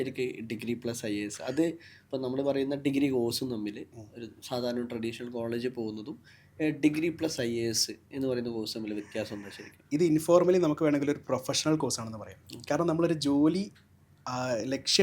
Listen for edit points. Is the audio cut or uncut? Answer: uncut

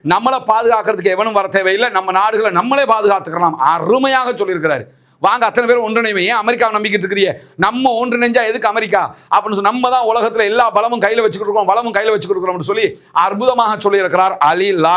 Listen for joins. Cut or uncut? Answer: uncut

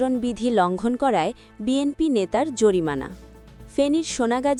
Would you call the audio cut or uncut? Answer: uncut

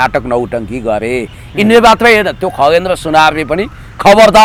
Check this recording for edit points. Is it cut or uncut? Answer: uncut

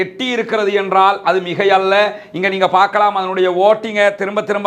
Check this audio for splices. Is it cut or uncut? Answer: uncut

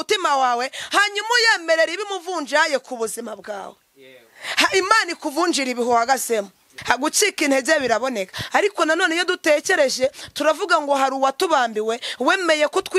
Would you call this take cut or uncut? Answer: cut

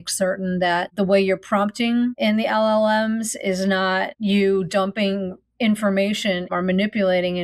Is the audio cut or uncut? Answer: cut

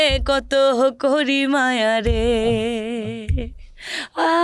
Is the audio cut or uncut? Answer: uncut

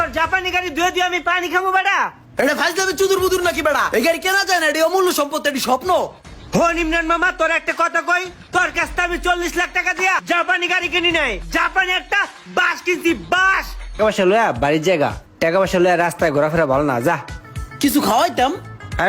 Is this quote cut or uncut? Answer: cut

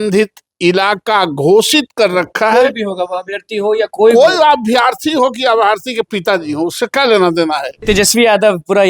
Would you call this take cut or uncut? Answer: cut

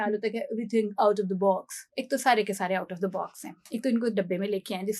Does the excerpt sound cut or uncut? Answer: uncut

